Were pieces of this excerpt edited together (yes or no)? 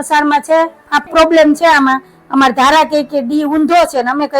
yes